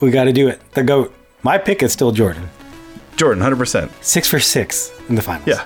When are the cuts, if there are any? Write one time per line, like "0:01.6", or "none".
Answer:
none